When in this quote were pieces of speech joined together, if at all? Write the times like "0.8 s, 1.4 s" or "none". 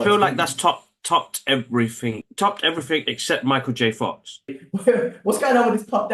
2.3 s, 4.6 s